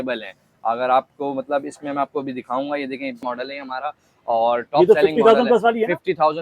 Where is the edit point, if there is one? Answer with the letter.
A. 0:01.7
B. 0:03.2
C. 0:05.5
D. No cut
B